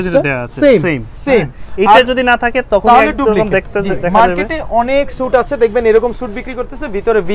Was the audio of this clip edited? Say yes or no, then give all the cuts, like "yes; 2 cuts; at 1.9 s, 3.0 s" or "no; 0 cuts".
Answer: no; 0 cuts